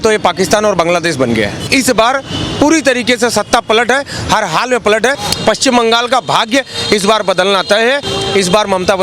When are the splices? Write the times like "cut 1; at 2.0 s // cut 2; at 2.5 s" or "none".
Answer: cut 1; at 1.7 s // cut 2; at 5.3 s // cut 3; at 8.1 s